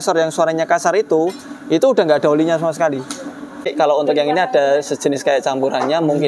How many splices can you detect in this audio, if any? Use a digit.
1